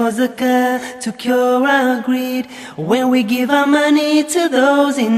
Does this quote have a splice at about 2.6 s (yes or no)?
no